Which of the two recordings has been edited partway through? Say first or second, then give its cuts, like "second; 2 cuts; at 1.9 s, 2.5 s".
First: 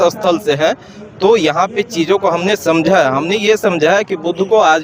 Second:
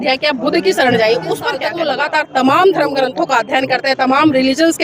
second; 1 cut; at 1.7 s